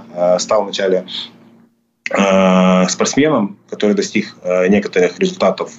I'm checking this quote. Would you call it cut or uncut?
uncut